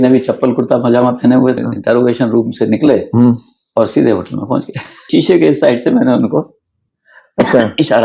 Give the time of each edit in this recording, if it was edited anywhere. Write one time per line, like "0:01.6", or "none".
0:01.6
0:05.1

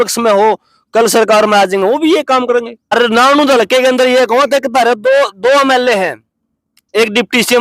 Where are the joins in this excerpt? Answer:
0:02.9

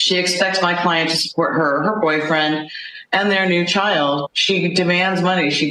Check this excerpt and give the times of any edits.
0:03.8

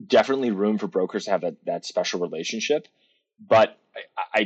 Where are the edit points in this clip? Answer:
none

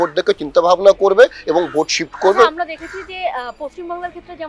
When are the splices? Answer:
none

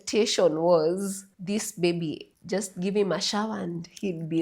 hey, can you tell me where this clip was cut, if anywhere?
0:01.3
0:02.3

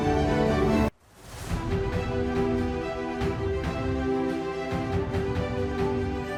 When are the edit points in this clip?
none

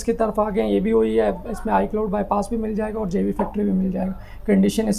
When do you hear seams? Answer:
none

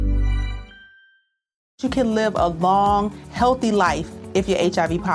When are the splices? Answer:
0:01.7

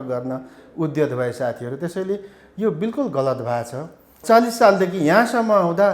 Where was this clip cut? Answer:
0:04.2

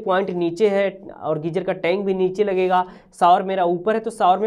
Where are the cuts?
none

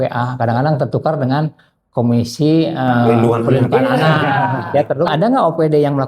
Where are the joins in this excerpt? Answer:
0:05.1

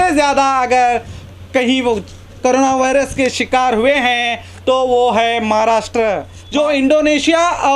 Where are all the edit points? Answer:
0:06.3

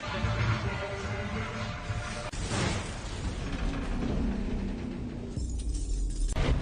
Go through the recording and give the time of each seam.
none

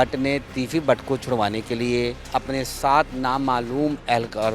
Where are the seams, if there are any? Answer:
0:02.2

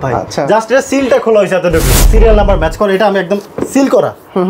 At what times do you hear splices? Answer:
0:02.1

